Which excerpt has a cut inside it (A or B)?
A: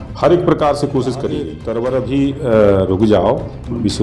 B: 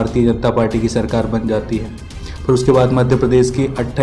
A